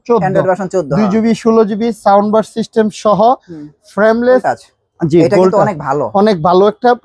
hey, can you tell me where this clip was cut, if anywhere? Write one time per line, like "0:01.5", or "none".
0:04.4